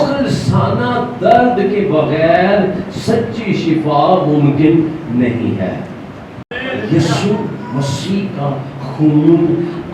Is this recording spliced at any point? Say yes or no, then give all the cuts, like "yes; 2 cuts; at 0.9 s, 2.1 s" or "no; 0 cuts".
yes; 1 cut; at 6.5 s